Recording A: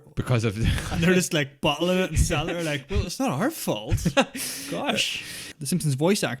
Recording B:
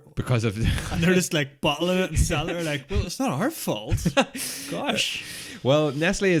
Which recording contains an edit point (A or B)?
A